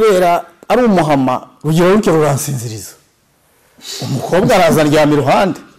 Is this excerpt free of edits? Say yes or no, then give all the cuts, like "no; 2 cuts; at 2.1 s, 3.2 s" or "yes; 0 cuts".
yes; 0 cuts